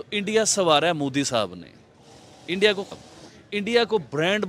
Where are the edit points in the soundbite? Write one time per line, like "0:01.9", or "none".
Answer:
0:03.0